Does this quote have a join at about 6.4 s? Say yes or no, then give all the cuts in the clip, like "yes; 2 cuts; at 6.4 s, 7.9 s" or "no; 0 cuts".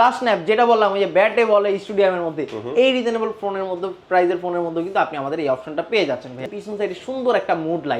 yes; 1 cut; at 6.4 s